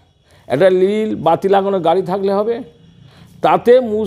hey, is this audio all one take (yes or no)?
yes